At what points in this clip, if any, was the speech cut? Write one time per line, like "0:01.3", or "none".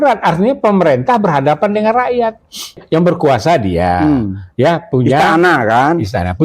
0:02.8